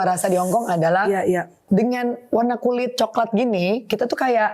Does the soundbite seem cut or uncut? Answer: cut